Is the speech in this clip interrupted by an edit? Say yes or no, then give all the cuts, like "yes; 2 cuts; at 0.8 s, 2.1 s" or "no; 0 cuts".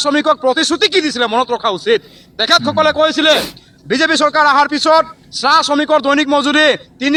no; 0 cuts